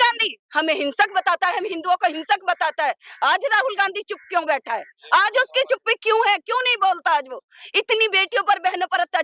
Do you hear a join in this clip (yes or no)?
no